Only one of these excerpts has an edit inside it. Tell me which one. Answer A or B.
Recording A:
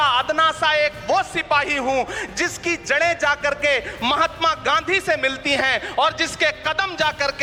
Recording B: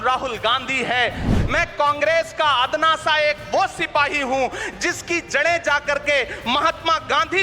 B